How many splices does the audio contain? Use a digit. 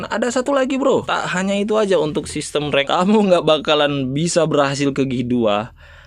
2